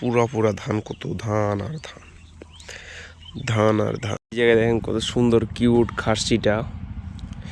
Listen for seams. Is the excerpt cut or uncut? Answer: cut